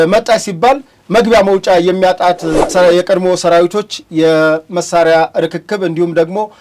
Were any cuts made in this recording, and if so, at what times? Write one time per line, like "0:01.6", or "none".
0:02.7